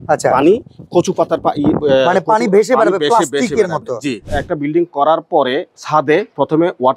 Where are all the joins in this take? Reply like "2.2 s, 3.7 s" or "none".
4.4 s